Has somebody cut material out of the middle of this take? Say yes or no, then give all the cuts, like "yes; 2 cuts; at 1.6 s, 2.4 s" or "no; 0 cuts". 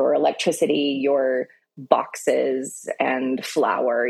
no; 0 cuts